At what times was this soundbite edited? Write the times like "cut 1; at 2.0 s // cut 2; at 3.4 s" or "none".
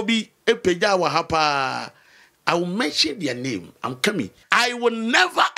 cut 1; at 4.4 s